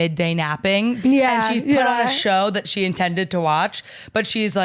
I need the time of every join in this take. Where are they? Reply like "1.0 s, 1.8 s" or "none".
1.0 s